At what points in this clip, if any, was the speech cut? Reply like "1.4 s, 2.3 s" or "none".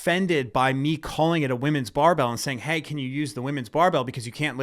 none